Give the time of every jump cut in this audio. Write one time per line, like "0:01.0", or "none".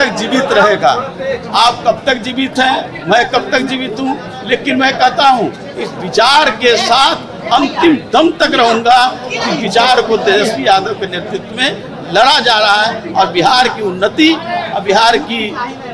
none